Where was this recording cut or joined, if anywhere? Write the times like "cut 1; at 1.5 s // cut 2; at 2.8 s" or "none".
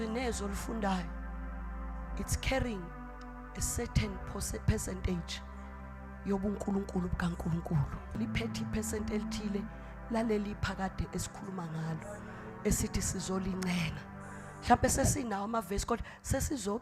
cut 1; at 8.2 s